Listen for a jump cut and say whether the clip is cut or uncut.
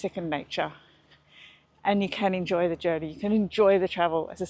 uncut